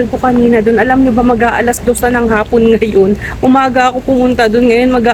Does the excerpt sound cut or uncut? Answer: uncut